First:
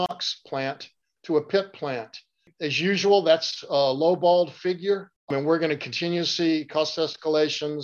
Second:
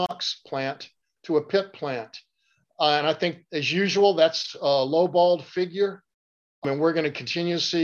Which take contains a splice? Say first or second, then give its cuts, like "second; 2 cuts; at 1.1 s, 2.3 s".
first; 2 cuts; at 2.5 s, 5.1 s